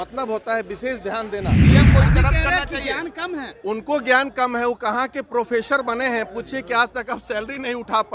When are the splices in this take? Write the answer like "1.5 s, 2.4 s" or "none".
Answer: 1.4 s, 2.1 s